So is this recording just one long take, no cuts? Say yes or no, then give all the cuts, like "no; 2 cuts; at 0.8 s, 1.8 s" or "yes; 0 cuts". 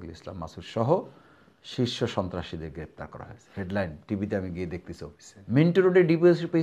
no; 1 cut; at 5.3 s